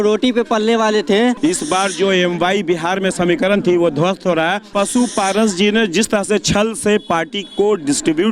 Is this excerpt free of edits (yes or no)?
no